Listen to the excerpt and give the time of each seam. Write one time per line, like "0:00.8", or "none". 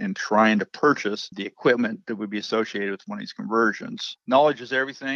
0:04.0